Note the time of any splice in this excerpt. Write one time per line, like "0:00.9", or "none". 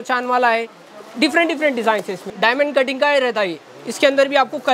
0:02.2